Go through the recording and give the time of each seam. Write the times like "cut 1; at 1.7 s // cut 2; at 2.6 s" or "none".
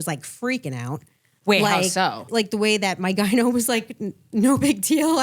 cut 1; at 2.3 s